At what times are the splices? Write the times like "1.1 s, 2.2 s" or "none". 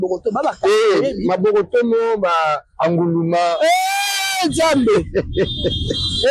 none